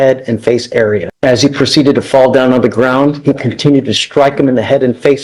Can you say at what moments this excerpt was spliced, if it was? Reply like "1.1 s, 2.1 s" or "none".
1.1 s